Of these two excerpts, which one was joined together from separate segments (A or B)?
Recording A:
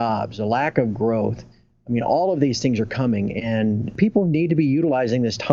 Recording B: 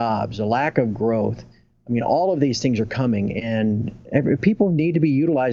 A